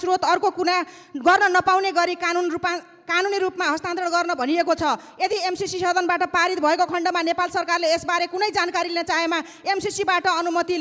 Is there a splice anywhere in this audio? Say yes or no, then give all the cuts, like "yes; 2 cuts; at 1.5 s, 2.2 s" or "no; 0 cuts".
no; 0 cuts